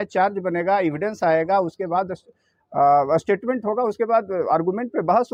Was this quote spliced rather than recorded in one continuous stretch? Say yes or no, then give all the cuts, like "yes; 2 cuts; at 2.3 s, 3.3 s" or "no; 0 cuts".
no; 0 cuts